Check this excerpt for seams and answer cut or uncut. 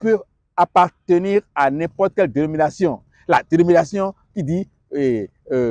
uncut